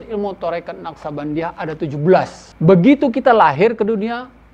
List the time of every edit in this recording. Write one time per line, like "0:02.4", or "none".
0:02.4